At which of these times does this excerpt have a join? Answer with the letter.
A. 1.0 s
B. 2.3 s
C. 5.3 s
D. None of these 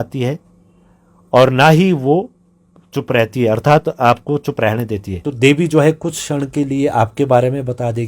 C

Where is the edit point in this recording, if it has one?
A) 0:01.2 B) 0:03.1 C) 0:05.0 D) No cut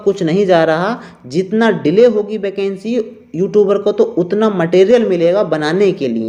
D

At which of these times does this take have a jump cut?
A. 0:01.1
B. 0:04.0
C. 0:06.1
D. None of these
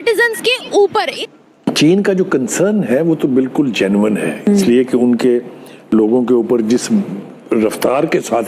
A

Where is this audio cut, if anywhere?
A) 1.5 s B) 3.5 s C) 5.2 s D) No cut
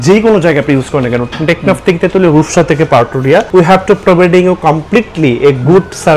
B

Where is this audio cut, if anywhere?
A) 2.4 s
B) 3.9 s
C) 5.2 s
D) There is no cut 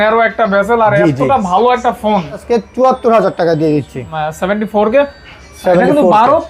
A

